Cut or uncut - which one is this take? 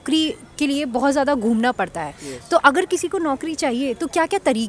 uncut